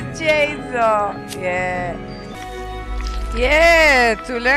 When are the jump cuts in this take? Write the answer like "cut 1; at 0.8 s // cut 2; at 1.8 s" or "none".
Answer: cut 1; at 2.3 s